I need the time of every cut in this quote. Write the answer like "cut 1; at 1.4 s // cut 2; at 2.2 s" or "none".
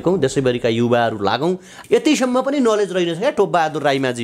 cut 1; at 1.8 s